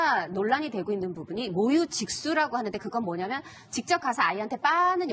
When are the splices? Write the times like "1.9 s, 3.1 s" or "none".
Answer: 3.4 s